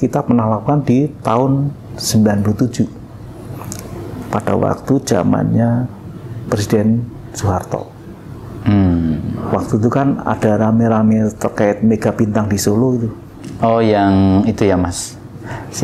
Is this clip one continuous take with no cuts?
yes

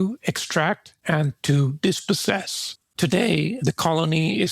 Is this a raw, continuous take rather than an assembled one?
no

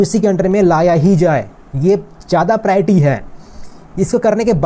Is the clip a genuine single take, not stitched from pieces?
yes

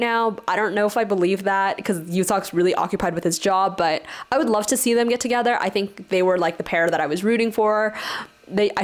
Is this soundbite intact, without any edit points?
yes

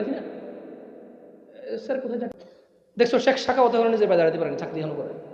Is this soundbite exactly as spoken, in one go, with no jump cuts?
no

